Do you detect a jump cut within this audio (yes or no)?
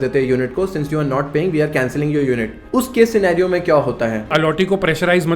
yes